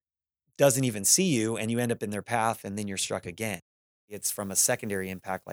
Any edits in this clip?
yes; 1 cut; at 4.2 s

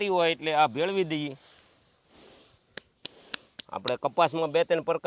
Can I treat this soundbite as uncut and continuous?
yes; 0 cuts

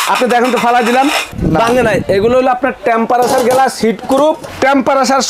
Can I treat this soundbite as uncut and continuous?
no; 2 cuts; at 1.3 s, 4.5 s

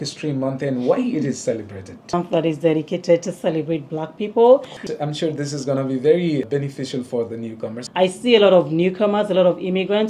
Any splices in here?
yes; 3 cuts; at 2.1 s, 4.7 s, 7.7 s

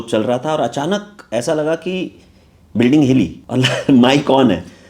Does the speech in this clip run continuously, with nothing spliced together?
no; 1 cut; at 3.4 s

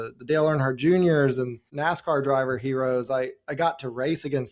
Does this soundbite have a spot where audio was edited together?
yes; 1 cut; at 1.6 s

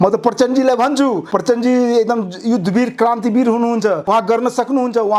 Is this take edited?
yes; 2 cuts; at 1.2 s, 4.0 s

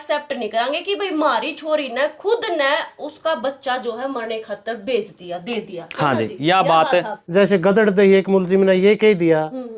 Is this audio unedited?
no; 1 cut; at 7.2 s

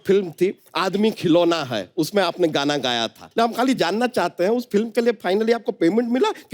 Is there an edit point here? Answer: yes; 1 cut; at 3.2 s

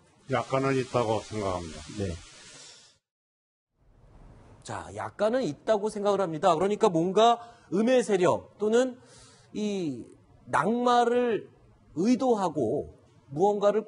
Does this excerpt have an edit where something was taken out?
yes; 1 cut; at 2.9 s

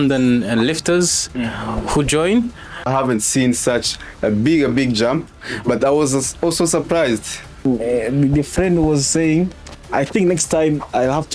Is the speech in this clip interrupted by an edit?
yes; 2 cuts; at 2.9 s, 7.6 s

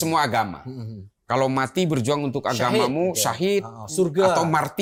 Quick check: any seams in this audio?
no; 0 cuts

